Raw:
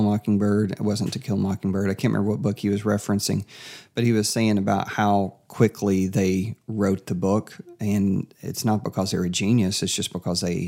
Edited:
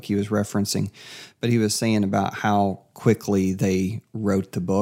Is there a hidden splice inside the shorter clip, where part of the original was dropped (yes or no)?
no